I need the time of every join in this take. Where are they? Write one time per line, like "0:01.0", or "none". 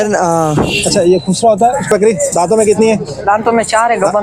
0:01.9